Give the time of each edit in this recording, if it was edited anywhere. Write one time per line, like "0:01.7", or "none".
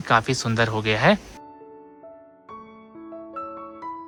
none